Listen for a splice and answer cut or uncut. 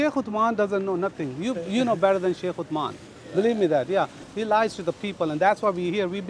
cut